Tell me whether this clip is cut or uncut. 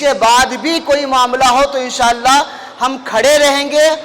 uncut